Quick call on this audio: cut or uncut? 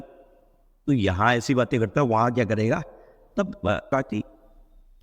cut